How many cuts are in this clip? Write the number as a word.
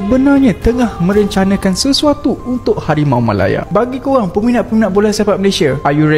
one